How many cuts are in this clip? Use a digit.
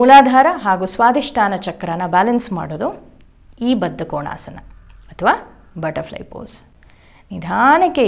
0